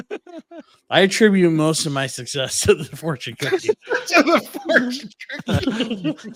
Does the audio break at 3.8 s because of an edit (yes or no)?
no